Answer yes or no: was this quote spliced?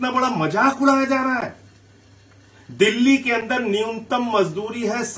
no